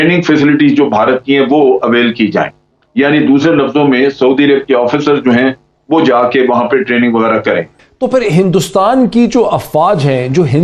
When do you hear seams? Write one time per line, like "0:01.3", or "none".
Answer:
0:07.8